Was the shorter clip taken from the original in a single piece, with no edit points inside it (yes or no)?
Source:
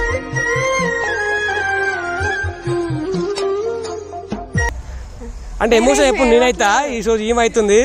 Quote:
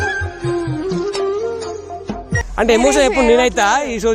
no